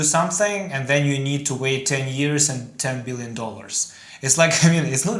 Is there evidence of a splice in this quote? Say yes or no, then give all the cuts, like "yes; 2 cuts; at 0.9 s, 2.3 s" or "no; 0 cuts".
no; 0 cuts